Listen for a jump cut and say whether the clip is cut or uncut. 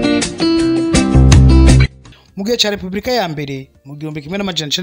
uncut